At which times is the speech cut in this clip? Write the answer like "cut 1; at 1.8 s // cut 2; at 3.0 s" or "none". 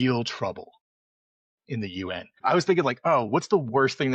cut 1; at 2.3 s